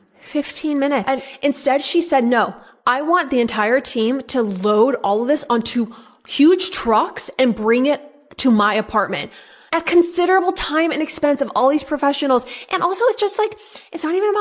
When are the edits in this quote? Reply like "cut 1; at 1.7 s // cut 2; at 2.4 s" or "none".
none